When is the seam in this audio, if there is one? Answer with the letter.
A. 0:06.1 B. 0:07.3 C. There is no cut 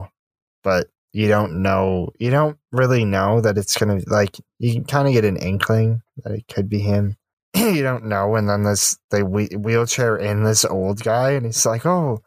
B